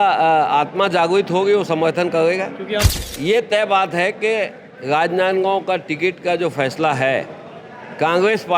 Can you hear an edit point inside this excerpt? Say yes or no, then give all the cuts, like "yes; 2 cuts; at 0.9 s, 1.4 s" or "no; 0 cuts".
yes; 1 cut; at 2.9 s